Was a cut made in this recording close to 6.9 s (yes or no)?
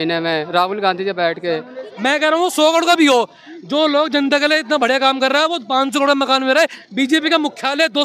no